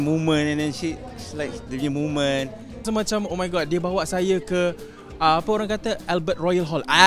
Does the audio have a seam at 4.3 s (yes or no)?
no